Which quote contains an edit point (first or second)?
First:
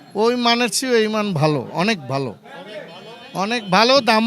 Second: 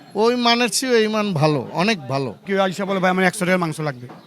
second